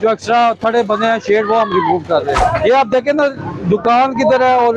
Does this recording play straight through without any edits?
no; 1 cut; at 2.4 s

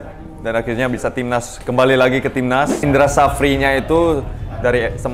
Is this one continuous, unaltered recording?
no; 1 cut; at 2.8 s

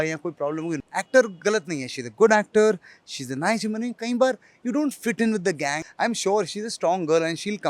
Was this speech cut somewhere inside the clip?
yes; 2 cuts; at 0.9 s, 5.8 s

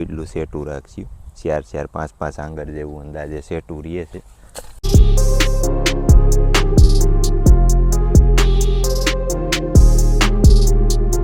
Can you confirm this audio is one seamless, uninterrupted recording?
yes; 0 cuts

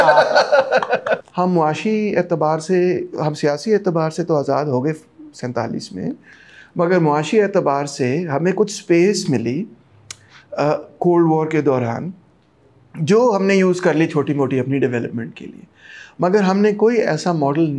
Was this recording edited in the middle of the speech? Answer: yes; 1 cut; at 1.2 s

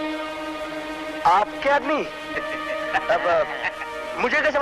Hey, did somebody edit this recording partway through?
yes; 1 cut; at 2.3 s

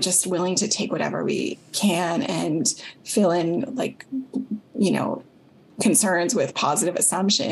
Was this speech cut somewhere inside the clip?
no; 0 cuts

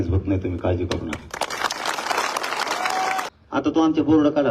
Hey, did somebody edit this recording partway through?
yes; 1 cut; at 3.3 s

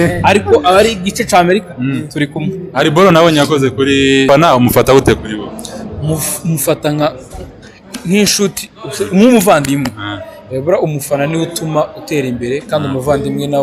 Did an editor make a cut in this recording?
yes; 1 cut; at 4.3 s

